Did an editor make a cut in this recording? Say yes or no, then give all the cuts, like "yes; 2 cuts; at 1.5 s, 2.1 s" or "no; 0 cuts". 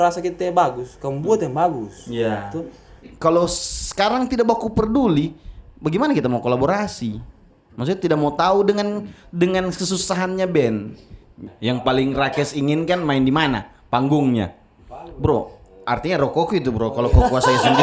yes; 2 cuts; at 3.1 s, 11.5 s